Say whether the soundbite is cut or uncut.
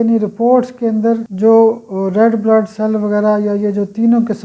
cut